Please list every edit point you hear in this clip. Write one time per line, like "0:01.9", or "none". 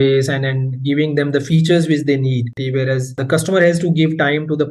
0:02.5